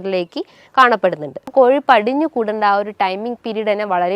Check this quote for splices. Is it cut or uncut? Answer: cut